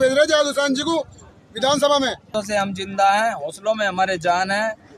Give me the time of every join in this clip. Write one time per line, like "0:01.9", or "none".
0:02.3

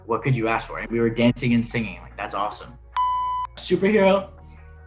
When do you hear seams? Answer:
0:03.2

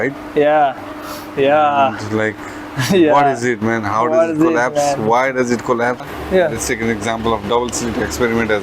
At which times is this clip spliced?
0:06.1

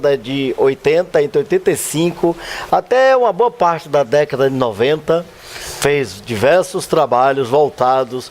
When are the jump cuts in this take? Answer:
0:06.2

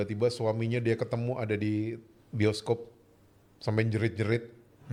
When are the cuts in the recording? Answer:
none

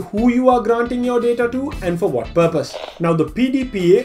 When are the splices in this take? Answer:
0:02.8

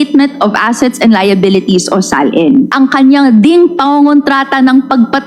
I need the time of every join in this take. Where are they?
0:02.7

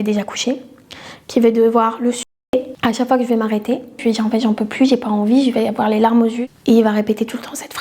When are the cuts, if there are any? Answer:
0:02.2
0:04.0
0:06.4

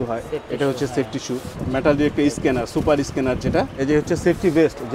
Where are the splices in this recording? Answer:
0:01.6
0:03.7

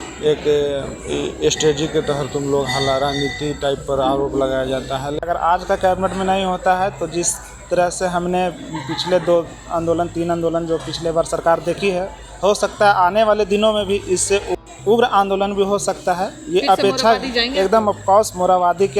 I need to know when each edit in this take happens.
0:05.2
0:14.6

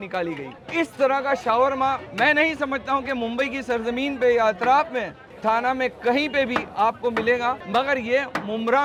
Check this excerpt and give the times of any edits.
none

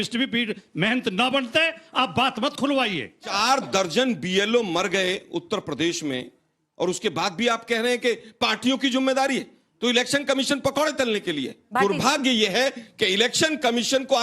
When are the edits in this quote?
0:03.3
0:11.5

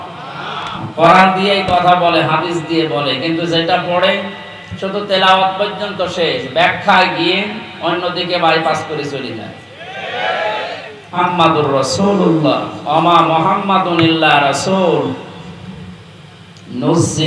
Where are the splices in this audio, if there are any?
0:11.2

